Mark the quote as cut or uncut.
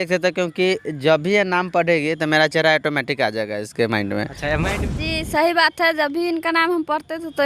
cut